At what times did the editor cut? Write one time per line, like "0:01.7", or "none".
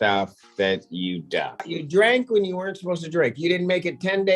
0:01.8